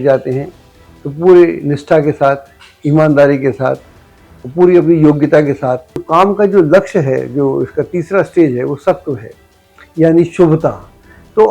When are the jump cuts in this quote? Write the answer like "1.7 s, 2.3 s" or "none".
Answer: 6.0 s

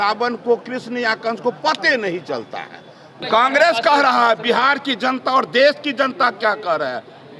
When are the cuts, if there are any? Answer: 3.1 s

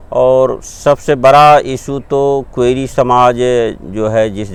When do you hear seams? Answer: none

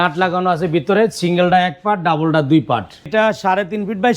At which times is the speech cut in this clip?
3.1 s

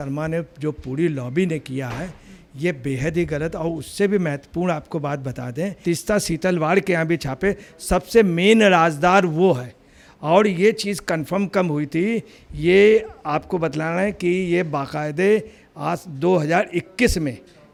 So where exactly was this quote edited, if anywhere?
none

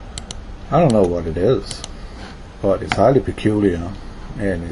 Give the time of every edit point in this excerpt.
1.0 s

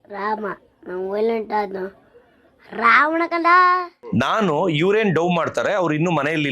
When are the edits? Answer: 3.9 s

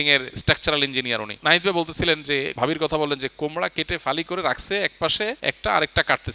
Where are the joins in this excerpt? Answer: 1.3 s, 2.5 s, 5.4 s

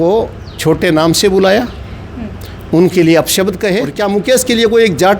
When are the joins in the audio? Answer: 3.9 s

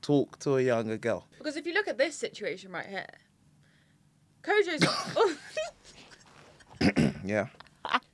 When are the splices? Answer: 1.3 s

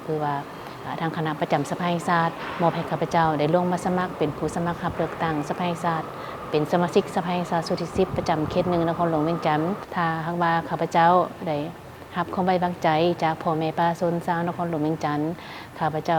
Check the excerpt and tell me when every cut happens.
9.8 s

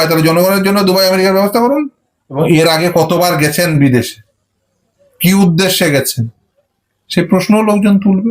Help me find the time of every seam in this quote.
2.2 s

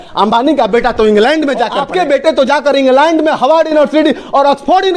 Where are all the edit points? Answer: 1.8 s

